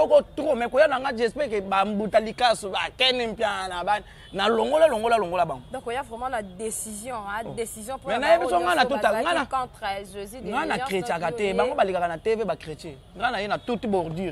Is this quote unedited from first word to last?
yes; 0 cuts

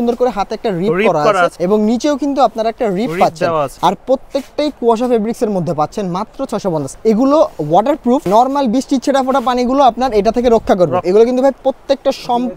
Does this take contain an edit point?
yes; 5 cuts; at 1.5 s, 3.7 s, 6.9 s, 8.2 s, 11.0 s

